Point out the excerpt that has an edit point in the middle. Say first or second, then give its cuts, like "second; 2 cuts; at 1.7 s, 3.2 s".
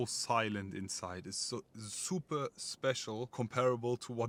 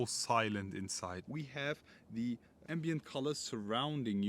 second; 1 cut; at 1.2 s